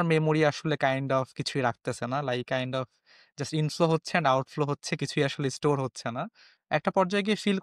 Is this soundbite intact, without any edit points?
no; 1 cut; at 6.5 s

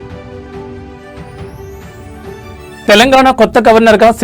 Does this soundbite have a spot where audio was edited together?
yes; 1 cut; at 2.8 s

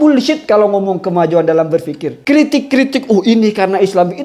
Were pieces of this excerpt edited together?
yes; 1 cut; at 2.1 s

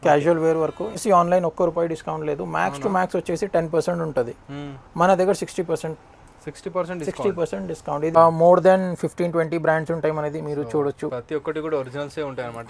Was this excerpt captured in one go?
no; 2 cuts; at 1.0 s, 8.2 s

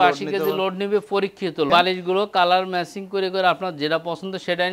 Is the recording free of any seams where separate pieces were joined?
no; 1 cut; at 1.7 s

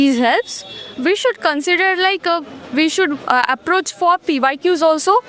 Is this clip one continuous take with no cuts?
yes; 0 cuts

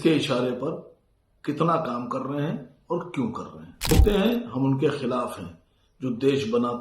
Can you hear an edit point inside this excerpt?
yes; 1 cut; at 3.9 s

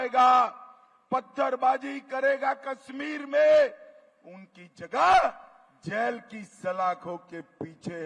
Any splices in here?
no; 0 cuts

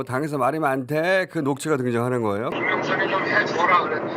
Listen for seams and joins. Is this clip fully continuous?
no; 1 cut; at 2.5 s

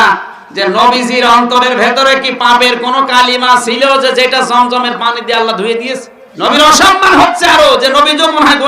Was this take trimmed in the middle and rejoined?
yes; 1 cut; at 6.2 s

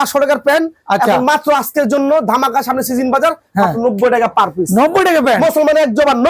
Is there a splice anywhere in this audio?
no; 0 cuts

